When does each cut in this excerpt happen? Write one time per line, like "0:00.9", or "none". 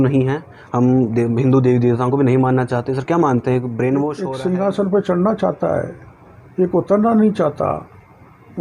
0:04.2